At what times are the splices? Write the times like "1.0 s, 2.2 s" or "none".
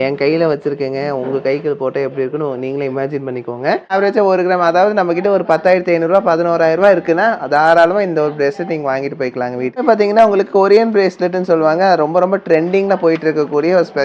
3.9 s, 9.9 s